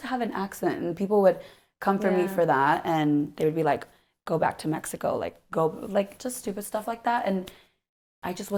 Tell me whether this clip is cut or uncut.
uncut